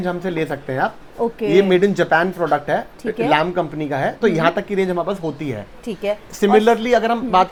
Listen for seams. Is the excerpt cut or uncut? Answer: uncut